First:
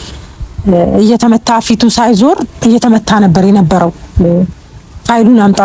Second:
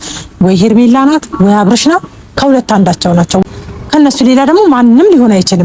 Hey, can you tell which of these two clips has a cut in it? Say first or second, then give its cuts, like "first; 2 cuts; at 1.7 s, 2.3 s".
second; 1 cut; at 3.4 s